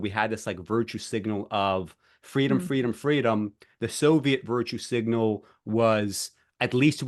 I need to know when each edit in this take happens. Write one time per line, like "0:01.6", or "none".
none